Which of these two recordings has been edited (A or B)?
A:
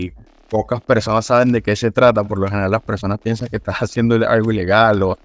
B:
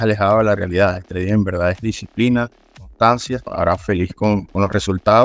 B